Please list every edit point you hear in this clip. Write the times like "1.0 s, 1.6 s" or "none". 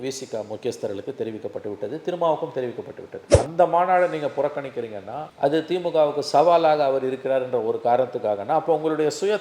3.3 s

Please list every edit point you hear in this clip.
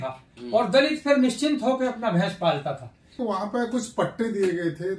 3.2 s

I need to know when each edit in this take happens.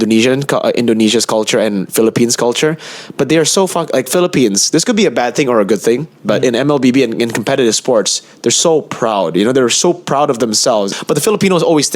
10.9 s

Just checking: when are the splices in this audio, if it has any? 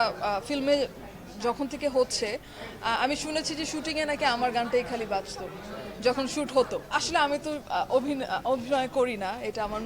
6.8 s

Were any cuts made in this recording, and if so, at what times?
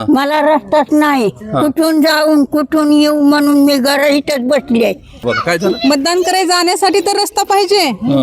5.2 s

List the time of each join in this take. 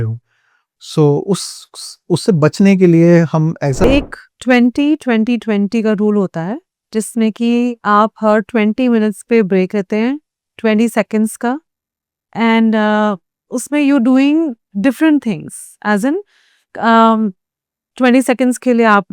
3.8 s

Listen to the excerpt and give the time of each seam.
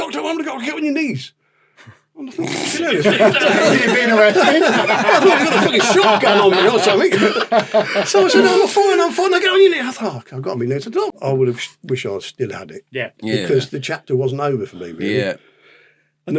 11.1 s

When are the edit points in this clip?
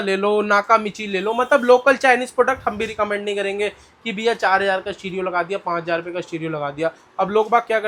none

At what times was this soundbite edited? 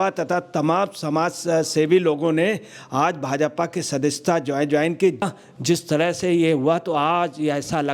5.2 s

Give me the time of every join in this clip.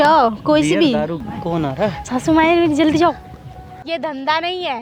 1.2 s, 3.8 s

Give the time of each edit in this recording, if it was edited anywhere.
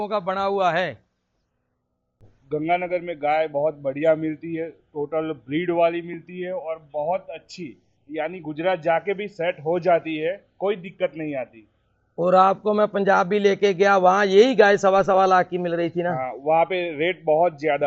2.3 s

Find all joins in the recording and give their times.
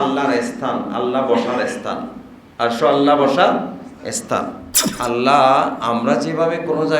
4.9 s

